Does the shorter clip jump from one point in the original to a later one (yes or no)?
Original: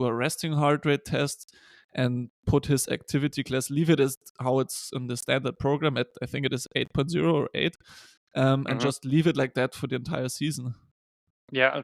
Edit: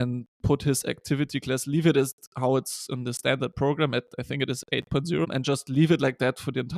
yes